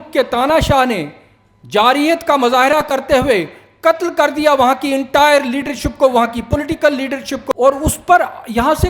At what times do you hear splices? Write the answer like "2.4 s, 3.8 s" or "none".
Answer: 7.4 s